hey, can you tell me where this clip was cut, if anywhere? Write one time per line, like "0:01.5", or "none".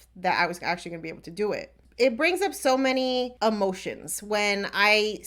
0:01.8
0:03.3